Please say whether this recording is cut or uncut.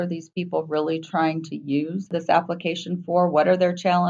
cut